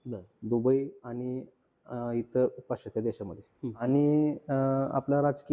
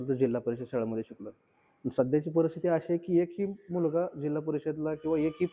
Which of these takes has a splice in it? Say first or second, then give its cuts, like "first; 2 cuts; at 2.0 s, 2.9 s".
first; 1 cut; at 3.8 s